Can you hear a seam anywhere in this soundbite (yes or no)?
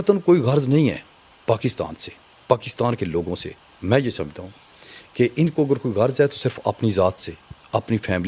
no